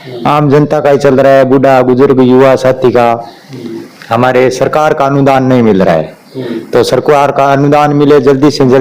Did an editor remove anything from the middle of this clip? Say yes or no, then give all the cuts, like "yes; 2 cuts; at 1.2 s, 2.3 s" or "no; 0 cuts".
no; 0 cuts